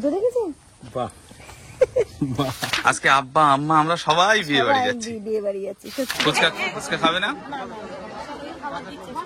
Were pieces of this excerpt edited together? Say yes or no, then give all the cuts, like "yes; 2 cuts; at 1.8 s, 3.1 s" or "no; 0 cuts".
yes; 2 cuts; at 2.7 s, 6.1 s